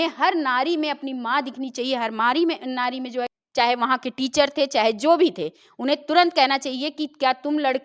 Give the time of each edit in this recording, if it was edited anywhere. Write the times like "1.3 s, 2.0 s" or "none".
3.4 s